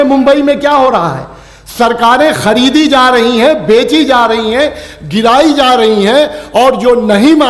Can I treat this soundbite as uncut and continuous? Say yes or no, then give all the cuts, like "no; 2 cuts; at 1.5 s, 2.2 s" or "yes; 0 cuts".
yes; 0 cuts